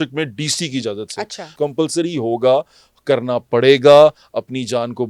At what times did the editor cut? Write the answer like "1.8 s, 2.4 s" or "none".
1.5 s